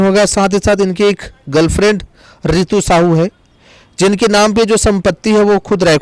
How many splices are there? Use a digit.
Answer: 0